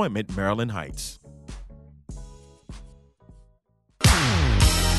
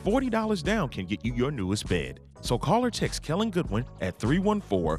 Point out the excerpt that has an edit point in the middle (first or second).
first